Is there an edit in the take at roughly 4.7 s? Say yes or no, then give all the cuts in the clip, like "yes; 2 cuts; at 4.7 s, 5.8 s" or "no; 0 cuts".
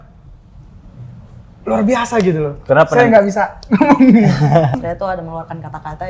yes; 1 cut; at 4.7 s